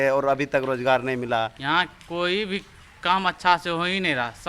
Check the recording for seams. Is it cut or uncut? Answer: cut